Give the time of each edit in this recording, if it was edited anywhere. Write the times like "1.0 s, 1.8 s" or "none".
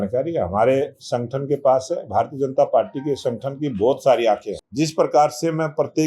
4.6 s